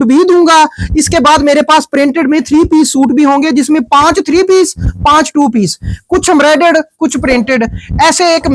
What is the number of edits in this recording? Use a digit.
0